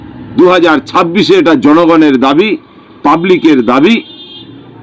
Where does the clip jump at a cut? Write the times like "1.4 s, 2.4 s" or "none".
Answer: none

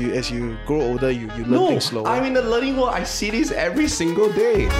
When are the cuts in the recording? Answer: none

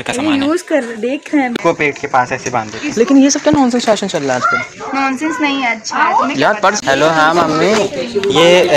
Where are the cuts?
1.6 s, 6.8 s

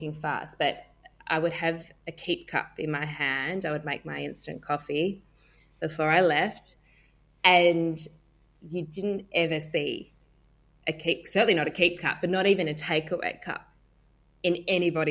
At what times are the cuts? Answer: none

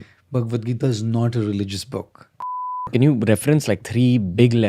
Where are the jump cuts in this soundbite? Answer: 2.5 s

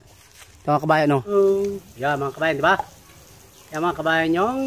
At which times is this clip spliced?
1.3 s

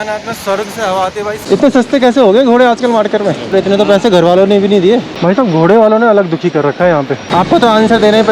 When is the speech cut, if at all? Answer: 1.4 s, 3.5 s, 5.1 s, 7.2 s

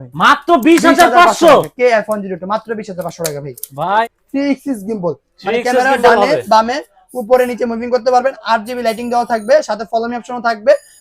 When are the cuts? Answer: 4.0 s

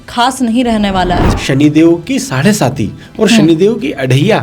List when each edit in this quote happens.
1.3 s

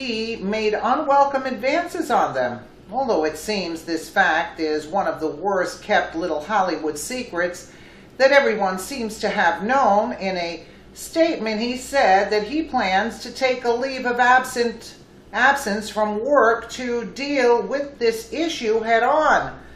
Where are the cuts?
none

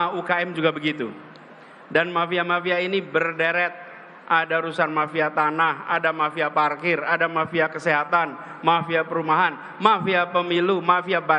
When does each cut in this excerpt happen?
none

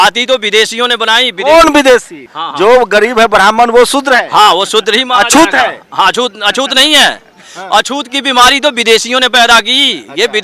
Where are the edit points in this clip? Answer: 2.4 s

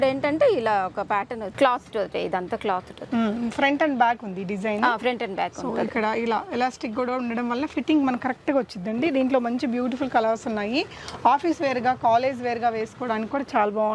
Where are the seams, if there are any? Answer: none

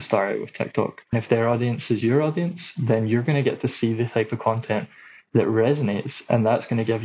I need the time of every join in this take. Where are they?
1.1 s

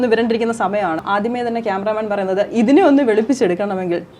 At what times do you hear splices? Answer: 1.0 s

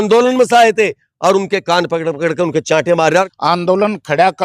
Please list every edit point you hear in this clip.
3.3 s

